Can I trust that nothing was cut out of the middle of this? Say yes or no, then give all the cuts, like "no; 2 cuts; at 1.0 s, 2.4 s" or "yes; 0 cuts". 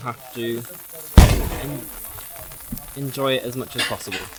yes; 0 cuts